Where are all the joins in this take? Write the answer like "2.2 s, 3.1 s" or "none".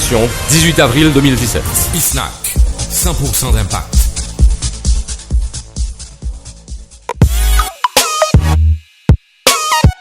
7.1 s